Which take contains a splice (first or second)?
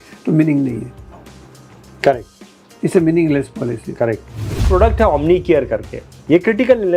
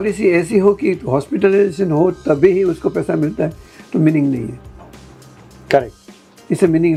first